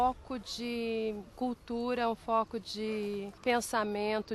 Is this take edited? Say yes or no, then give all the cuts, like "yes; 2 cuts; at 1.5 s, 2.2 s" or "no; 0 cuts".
yes; 2 cuts; at 1.3 s, 3.3 s